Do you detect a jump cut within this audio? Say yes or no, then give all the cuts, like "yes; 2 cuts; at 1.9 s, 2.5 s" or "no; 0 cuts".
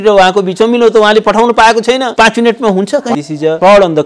yes; 2 cuts; at 2.1 s, 3.2 s